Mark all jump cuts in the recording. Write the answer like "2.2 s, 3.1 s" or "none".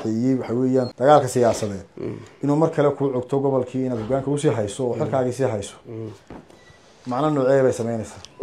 0.9 s